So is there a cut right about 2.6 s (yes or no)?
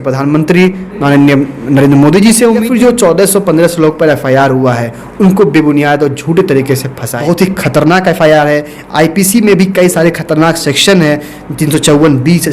yes